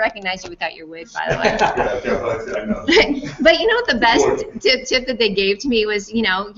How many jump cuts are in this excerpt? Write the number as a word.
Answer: one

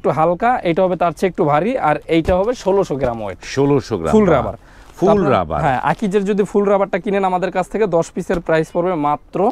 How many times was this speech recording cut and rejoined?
zero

